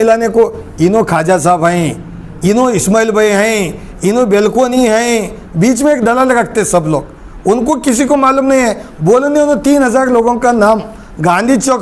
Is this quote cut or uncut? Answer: uncut